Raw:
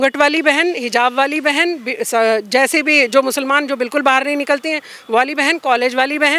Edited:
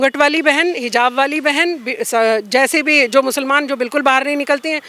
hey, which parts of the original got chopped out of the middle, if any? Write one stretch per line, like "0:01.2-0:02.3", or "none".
none